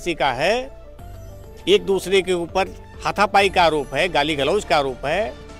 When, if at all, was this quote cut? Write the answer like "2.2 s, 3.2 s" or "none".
none